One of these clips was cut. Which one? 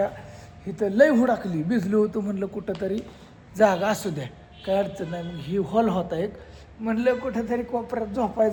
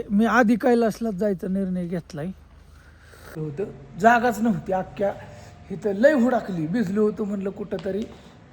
second; 1 cut; at 3.3 s

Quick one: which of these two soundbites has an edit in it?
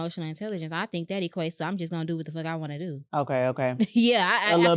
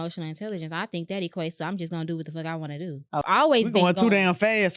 second; 1 cut; at 3.2 s

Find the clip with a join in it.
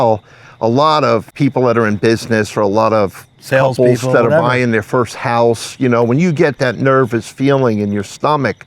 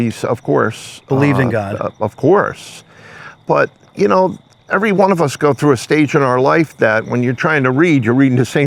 first; 1 cut; at 1.3 s

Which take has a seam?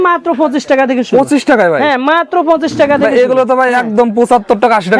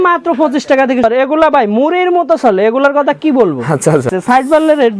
second; 2 cuts; at 1.0 s, 4.1 s

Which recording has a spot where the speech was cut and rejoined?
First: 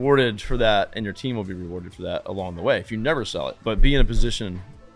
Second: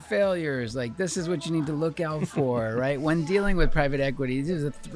first; 1 cut; at 3.6 s

